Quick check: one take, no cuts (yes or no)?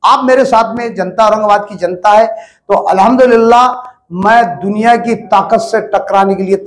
yes